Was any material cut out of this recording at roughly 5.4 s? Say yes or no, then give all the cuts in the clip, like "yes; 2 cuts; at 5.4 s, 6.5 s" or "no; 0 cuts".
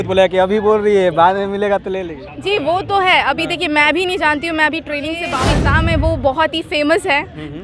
yes; 1 cut; at 5.4 s